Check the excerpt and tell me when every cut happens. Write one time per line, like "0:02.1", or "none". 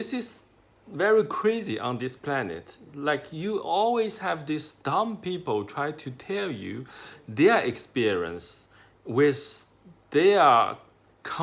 none

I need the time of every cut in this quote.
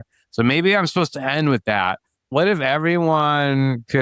0:02.3

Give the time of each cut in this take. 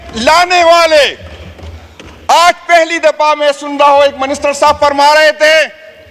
none

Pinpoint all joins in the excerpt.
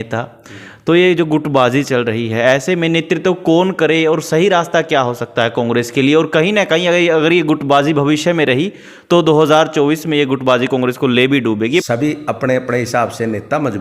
0:11.8

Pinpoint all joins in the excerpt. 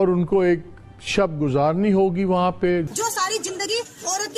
0:02.9

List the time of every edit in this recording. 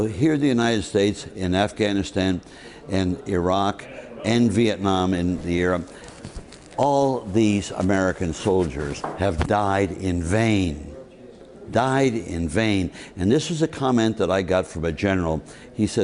0:06.9

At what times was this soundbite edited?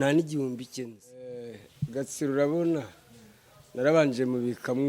0:01.6

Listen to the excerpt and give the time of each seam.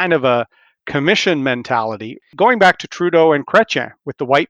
0:02.3

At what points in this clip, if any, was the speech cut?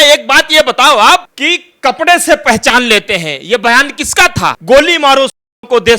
0:01.3
0:04.6

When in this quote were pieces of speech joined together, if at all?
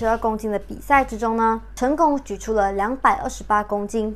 0:01.7

